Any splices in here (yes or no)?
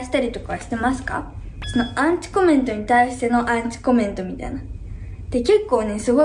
no